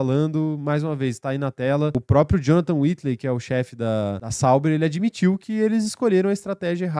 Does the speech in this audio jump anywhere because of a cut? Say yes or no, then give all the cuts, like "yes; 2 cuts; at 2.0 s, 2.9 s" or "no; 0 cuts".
yes; 2 cuts; at 1.9 s, 4.3 s